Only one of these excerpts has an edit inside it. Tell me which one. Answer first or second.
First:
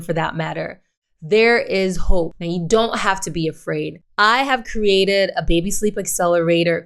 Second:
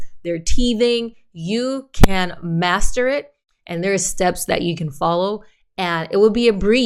first